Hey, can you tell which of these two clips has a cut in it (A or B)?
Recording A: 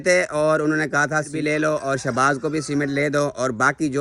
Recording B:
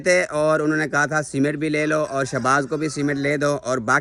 A